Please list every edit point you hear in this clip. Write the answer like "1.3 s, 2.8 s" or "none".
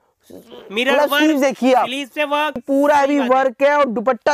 2.6 s